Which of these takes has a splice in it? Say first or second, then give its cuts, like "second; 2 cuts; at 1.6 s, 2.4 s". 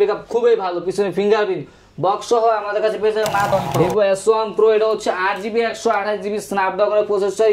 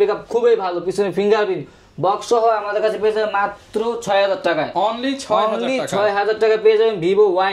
first; 1 cut; at 3.5 s